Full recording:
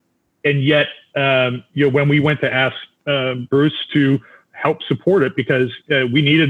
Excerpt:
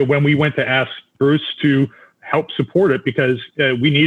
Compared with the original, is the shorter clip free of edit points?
no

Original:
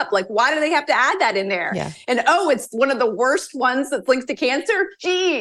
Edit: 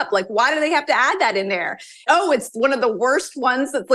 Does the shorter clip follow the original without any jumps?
no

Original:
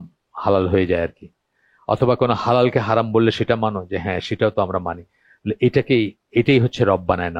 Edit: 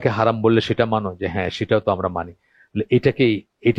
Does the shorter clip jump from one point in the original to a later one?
no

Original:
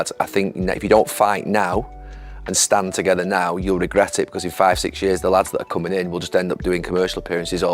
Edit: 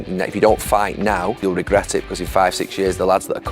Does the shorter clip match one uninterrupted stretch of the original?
no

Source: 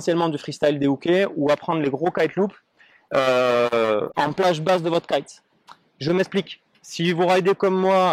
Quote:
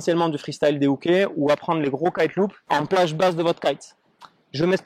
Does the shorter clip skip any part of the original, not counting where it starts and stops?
yes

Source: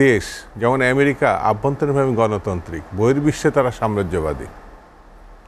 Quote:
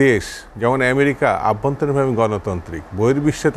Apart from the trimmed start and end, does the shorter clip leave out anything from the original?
no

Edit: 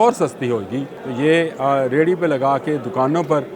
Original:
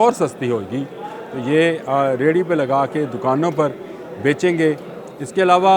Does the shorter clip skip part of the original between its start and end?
yes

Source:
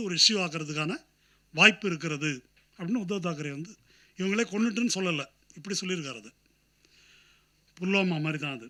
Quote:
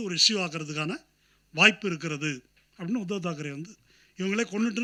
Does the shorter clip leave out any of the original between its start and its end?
no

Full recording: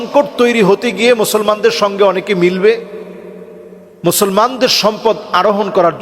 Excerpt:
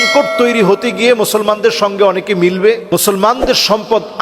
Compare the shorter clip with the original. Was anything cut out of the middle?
yes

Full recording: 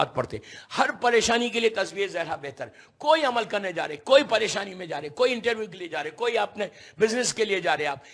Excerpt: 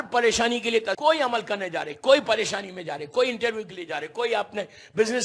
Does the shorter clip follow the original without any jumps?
no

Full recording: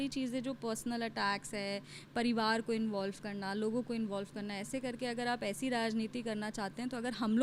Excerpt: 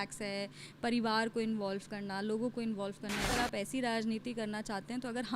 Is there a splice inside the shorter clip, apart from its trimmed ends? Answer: yes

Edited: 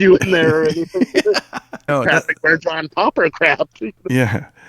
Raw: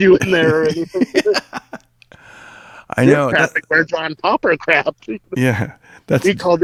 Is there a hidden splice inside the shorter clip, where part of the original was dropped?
yes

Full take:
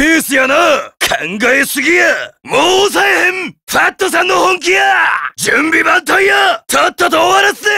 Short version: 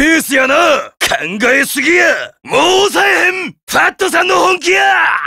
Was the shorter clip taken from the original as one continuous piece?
yes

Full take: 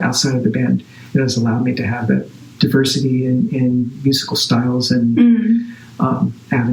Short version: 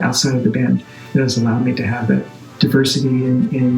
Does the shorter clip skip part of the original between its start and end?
no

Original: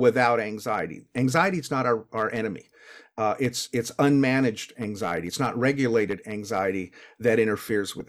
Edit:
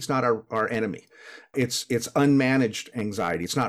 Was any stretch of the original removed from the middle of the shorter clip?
yes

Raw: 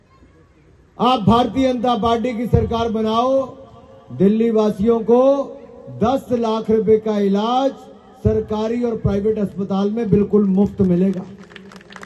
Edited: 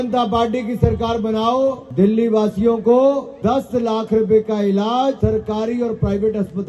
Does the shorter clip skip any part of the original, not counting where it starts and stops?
yes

